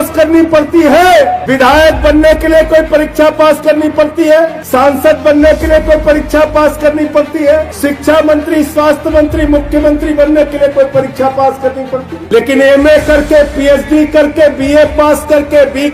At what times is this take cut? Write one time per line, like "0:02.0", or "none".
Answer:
0:01.4
0:04.7
0:07.7
0:12.1